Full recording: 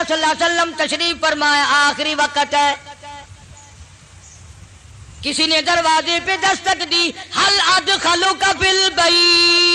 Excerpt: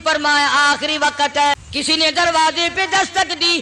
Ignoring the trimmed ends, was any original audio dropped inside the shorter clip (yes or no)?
yes